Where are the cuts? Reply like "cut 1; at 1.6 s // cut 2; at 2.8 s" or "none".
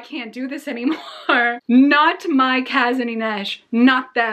none